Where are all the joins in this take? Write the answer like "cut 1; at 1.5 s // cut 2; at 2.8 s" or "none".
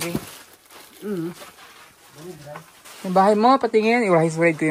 none